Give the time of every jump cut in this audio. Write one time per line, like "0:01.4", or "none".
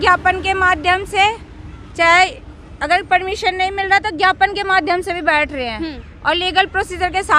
none